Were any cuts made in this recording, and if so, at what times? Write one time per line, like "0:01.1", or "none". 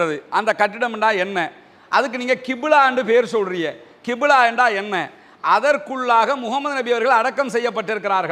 none